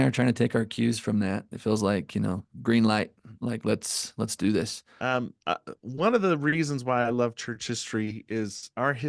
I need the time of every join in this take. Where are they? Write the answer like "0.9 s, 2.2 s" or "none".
4.8 s